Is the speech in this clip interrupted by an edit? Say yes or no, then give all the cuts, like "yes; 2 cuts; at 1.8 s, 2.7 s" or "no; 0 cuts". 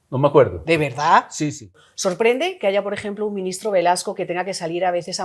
yes; 1 cut; at 1.7 s